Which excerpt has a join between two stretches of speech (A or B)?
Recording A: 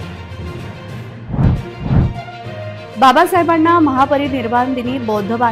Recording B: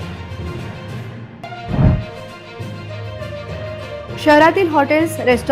A